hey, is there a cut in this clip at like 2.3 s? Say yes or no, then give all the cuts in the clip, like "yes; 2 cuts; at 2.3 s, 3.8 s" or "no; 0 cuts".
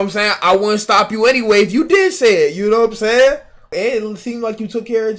no; 1 cut; at 3.7 s